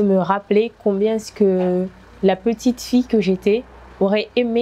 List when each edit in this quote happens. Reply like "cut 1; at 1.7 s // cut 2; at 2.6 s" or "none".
none